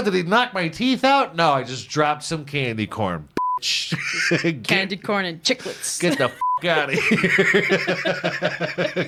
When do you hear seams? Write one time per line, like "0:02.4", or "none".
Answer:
none